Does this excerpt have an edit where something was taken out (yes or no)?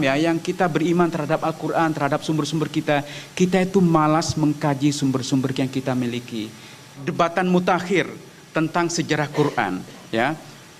yes